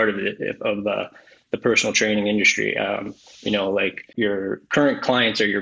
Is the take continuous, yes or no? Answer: no